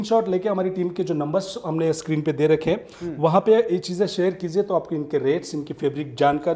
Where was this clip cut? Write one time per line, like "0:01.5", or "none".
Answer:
none